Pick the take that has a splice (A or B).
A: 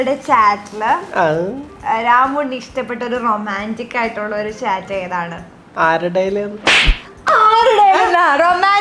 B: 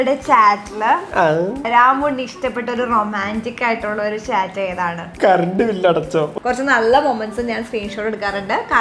B